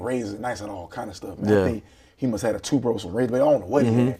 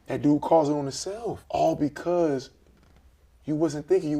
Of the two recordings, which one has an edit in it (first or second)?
second